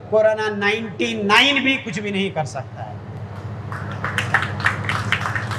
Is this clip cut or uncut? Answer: uncut